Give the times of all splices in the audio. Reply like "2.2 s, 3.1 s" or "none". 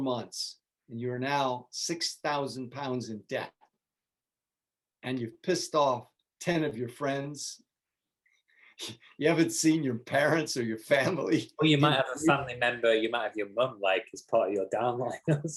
none